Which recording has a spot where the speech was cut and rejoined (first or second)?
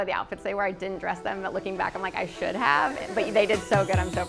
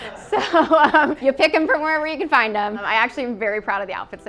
second